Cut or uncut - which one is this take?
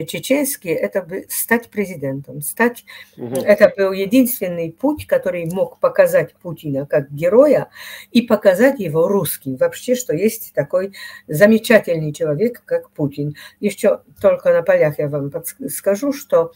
uncut